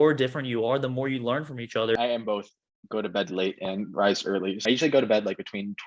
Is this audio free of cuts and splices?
no; 2 cuts; at 2.0 s, 4.6 s

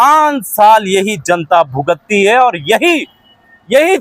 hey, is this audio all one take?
yes; 0 cuts

